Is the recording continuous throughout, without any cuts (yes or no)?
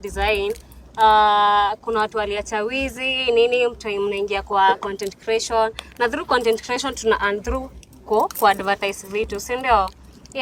yes